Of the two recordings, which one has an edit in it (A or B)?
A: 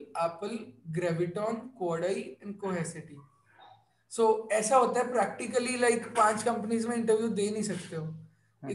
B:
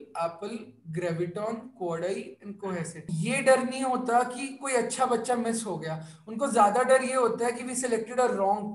B